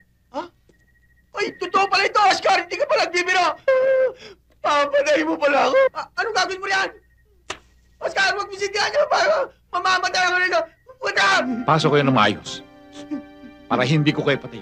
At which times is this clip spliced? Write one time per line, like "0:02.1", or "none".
0:11.4